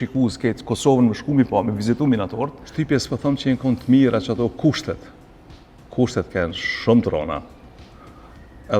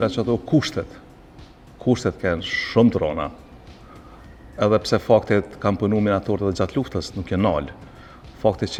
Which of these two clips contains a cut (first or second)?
first